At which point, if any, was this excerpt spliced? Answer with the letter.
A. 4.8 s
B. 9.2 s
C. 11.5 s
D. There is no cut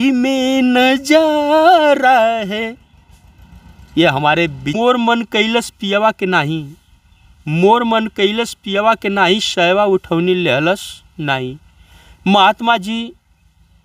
A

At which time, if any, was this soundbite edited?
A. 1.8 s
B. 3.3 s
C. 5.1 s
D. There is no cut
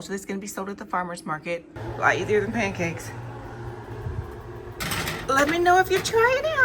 A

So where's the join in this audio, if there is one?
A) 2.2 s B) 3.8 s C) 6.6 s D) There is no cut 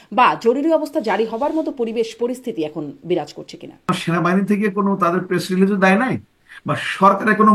B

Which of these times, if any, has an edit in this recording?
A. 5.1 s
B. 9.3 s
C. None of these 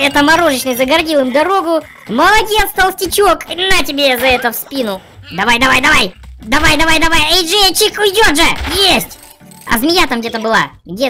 A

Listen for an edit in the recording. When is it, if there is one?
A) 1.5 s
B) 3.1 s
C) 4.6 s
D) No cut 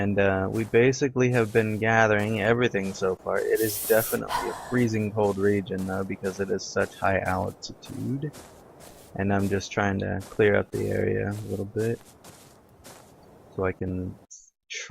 C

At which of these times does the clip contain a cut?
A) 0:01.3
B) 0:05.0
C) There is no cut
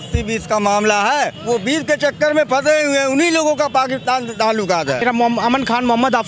B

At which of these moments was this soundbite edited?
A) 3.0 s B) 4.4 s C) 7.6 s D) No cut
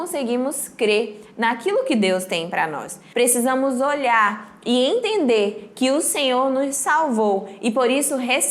A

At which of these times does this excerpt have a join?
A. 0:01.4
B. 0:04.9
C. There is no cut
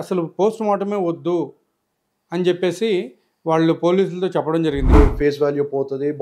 B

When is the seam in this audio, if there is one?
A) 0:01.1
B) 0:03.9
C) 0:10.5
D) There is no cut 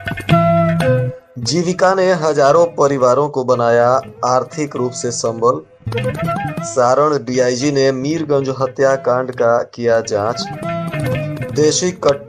A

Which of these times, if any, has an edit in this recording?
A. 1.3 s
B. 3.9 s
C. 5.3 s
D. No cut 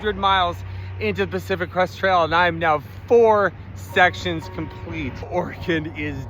C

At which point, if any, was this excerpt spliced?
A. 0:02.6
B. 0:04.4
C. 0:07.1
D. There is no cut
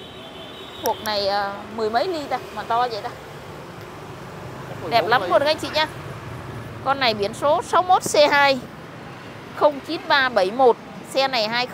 D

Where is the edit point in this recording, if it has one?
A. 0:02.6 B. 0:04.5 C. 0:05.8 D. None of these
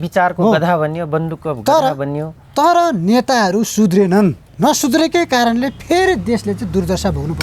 B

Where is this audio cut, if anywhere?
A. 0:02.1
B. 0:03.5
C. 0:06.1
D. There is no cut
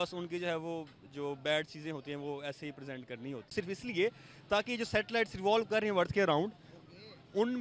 B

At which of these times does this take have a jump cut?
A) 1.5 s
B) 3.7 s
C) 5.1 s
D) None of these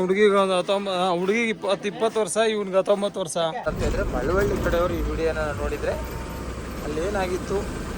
B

